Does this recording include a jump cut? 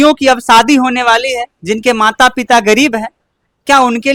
no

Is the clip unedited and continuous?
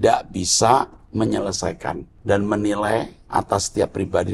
no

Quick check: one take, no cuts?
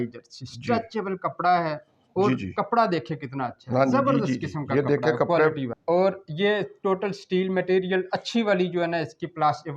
no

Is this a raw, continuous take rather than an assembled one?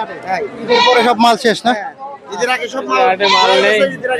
yes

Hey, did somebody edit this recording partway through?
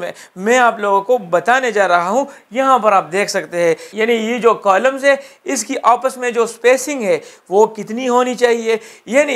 no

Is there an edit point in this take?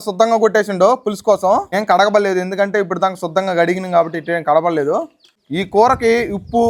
no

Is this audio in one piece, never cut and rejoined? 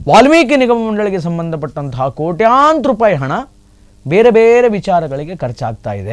yes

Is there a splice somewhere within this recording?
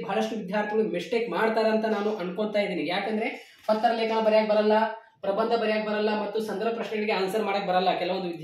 no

